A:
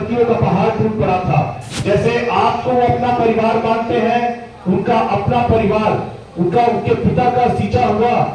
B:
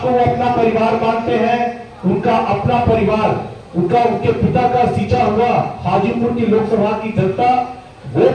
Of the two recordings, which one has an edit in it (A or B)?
A